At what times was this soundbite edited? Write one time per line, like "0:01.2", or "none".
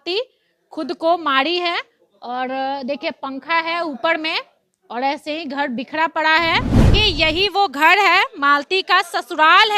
0:06.9